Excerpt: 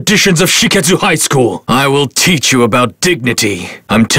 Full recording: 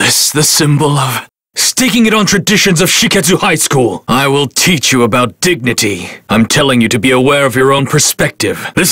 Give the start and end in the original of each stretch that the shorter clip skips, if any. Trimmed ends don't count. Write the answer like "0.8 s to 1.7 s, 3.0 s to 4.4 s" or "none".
none